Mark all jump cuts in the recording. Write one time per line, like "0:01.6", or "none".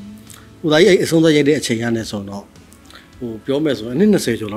none